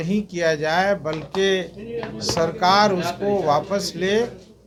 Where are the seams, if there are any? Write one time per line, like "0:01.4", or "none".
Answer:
none